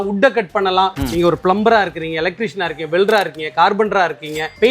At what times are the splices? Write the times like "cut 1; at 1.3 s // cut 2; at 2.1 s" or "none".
cut 1; at 1.0 s